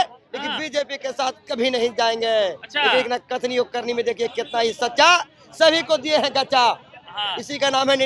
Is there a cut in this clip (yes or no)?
no